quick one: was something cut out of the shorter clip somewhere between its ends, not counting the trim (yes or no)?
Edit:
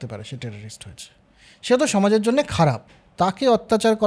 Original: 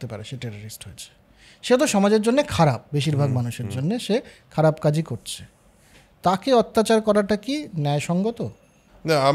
yes